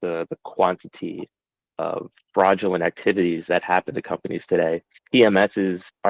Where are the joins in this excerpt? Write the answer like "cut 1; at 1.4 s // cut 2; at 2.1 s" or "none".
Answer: cut 1; at 4.9 s